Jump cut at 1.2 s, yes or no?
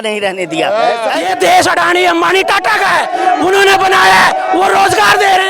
yes